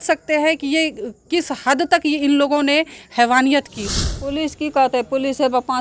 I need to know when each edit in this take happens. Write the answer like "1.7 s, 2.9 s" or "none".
3.8 s